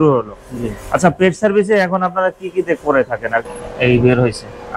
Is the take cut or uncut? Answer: cut